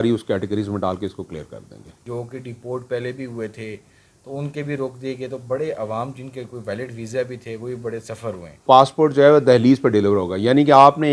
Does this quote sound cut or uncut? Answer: cut